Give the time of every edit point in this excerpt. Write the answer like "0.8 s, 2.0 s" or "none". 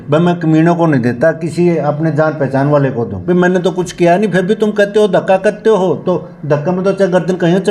3.1 s